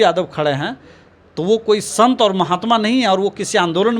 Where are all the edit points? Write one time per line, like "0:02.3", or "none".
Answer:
none